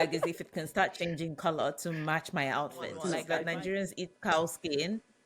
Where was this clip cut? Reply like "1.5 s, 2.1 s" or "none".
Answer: 3.2 s